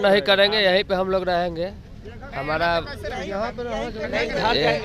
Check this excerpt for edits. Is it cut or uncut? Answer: uncut